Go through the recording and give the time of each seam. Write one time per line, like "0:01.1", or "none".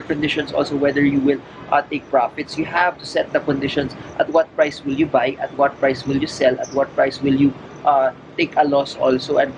none